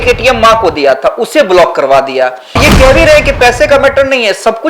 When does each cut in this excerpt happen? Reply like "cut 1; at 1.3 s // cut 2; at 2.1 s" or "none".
cut 1; at 2.6 s